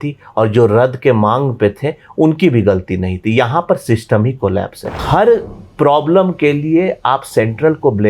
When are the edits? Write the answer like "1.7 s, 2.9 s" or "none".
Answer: 4.9 s